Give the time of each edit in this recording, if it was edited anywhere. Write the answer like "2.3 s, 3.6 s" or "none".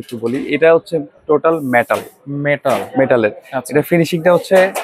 none

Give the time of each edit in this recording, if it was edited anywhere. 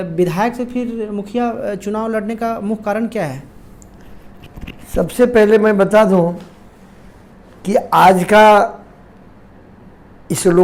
none

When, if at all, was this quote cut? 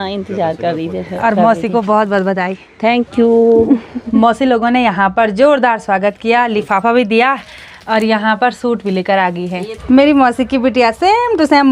4.0 s, 9.7 s

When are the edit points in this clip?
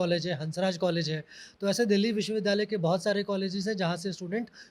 none

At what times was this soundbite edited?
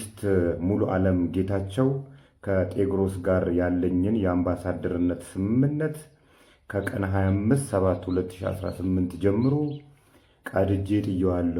none

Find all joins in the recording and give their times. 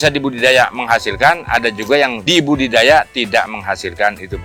2.2 s

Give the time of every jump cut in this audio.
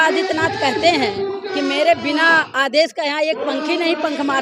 none

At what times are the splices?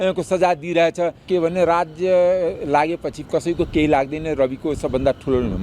1.2 s

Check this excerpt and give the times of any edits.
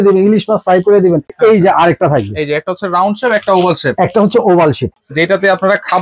1.3 s, 5.0 s

